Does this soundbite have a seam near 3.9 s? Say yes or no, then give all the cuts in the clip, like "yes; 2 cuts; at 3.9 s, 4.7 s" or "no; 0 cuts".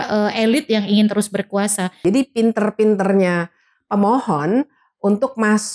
no; 1 cut; at 2.0 s